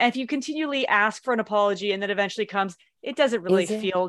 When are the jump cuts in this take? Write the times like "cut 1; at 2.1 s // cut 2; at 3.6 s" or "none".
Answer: none